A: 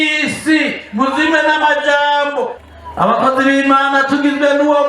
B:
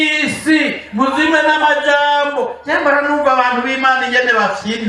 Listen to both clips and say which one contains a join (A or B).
A